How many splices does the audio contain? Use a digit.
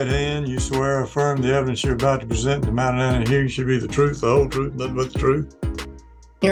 0